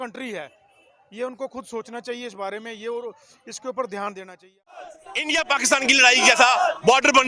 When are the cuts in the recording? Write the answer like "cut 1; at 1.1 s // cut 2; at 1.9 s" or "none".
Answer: cut 1; at 5.0 s